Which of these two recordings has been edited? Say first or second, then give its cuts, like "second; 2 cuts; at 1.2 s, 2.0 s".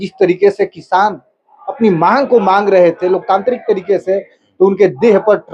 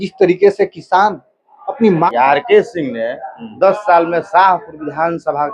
second; 1 cut; at 2.1 s